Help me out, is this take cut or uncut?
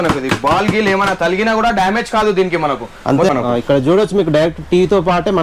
cut